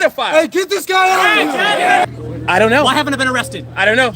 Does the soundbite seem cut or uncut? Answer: cut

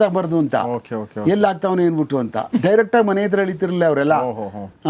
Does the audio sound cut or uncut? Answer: uncut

